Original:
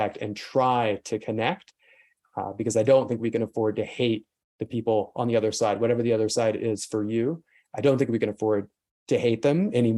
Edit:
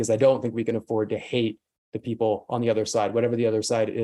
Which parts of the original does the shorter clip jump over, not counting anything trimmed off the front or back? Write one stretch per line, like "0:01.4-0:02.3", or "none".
none